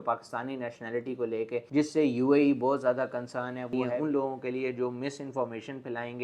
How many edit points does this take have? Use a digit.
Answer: 1